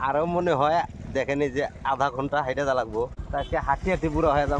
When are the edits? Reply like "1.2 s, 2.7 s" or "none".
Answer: 3.2 s